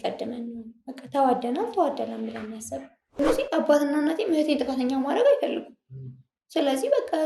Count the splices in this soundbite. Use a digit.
1